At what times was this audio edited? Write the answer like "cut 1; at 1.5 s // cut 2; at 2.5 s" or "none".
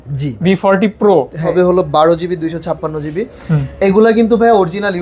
cut 1; at 1.4 s